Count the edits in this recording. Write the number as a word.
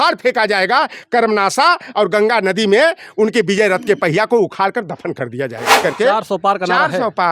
one